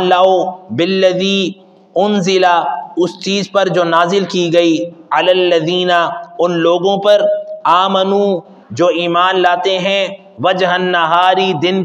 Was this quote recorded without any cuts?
yes; 0 cuts

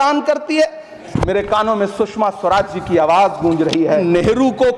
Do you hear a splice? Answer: yes; 2 cuts; at 1.0 s, 4.0 s

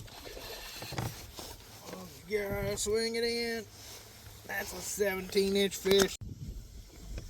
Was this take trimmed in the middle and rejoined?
yes; 1 cut; at 6.2 s

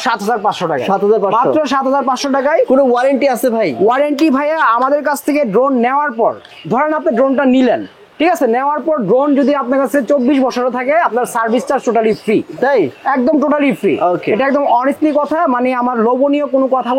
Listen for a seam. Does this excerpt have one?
no; 0 cuts

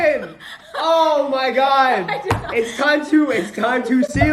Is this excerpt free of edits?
yes; 0 cuts

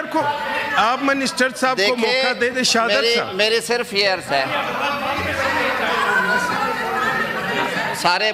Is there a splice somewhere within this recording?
no; 0 cuts

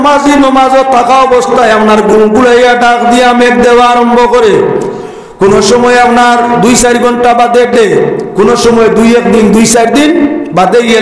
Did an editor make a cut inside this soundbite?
no; 0 cuts

